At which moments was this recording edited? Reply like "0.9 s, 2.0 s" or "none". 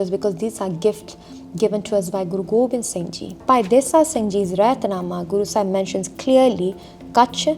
3.4 s